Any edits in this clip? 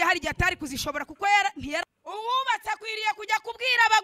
yes; 1 cut; at 1.8 s

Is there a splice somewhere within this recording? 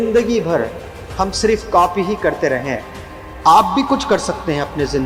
no; 0 cuts

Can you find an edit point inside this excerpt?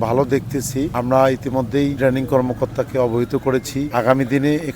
yes; 3 cuts; at 0.9 s, 2.0 s, 3.9 s

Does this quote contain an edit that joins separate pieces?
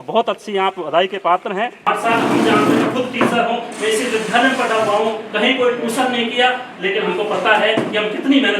yes; 1 cut; at 1.9 s

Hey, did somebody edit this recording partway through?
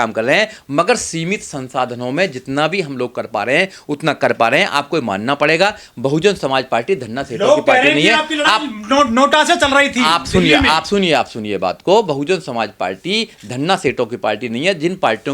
no; 0 cuts

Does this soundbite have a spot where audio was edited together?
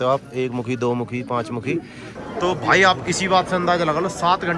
yes; 1 cut; at 2.1 s

